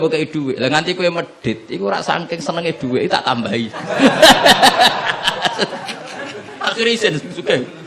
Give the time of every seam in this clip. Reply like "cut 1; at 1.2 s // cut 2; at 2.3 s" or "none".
cut 1; at 6.5 s